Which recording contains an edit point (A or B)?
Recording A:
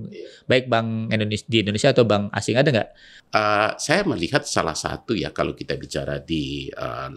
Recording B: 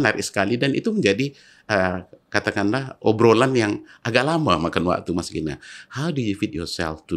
A